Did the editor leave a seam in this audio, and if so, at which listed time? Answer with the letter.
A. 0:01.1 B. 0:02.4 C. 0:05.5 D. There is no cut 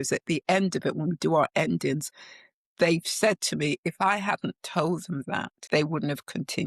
C